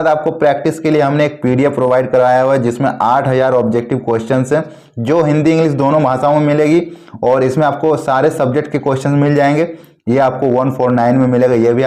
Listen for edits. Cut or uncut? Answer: uncut